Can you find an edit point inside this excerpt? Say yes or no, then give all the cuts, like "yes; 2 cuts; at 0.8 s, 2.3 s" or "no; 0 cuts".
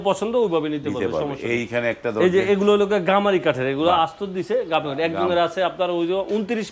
no; 0 cuts